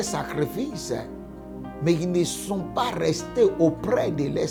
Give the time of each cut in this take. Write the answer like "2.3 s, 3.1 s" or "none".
none

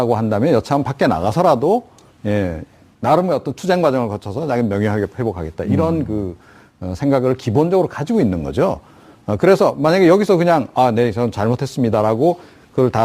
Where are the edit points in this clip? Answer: 1.5 s

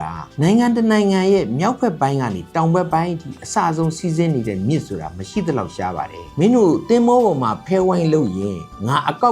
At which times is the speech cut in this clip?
6.2 s

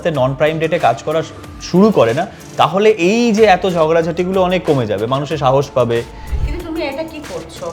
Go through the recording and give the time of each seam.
6.2 s

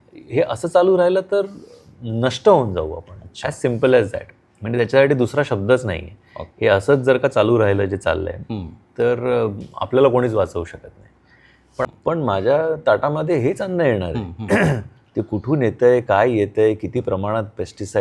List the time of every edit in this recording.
11.8 s

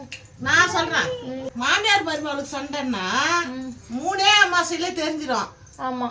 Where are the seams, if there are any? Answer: 1.5 s

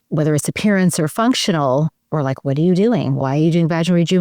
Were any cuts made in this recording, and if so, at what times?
3.2 s

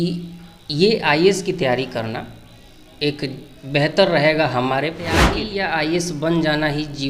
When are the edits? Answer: 5.3 s

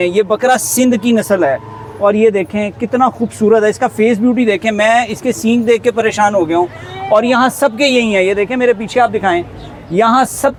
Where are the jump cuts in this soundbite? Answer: none

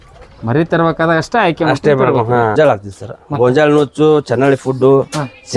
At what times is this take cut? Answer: 2.5 s

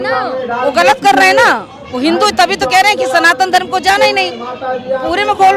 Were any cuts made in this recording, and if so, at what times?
none

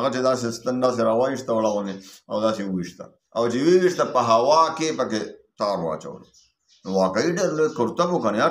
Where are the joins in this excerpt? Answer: none

